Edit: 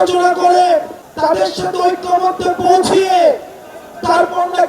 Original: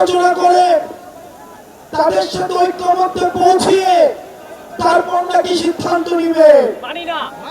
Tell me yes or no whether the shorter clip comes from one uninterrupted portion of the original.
no